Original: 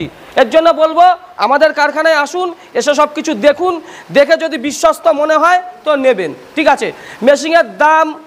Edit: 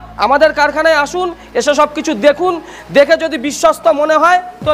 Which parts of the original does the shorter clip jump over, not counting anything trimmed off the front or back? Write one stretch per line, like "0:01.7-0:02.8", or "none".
none